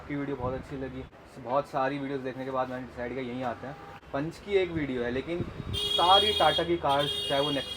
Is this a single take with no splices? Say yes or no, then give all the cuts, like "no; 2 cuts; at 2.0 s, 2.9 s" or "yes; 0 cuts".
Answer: no; 2 cuts; at 1.2 s, 4.0 s